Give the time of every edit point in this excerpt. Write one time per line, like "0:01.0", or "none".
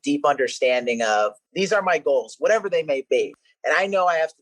0:01.4
0:03.2